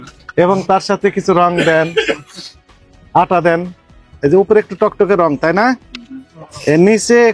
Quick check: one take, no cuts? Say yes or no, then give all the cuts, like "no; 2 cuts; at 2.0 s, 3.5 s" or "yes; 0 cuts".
no; 1 cut; at 4.0 s